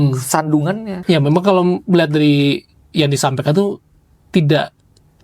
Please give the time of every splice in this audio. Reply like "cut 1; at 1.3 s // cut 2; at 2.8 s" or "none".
cut 1; at 0.9 s